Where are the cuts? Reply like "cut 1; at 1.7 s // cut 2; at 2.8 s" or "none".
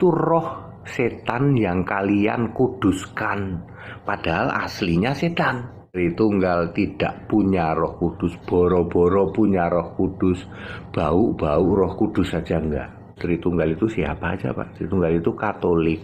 cut 1; at 6.0 s // cut 2; at 13.2 s